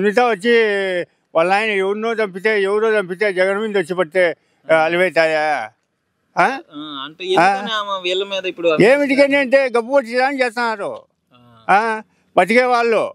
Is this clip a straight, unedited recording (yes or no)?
yes